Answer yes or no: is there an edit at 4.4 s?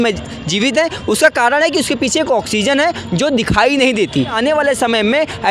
yes